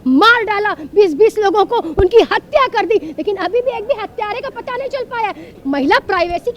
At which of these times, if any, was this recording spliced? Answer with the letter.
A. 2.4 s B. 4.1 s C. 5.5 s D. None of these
C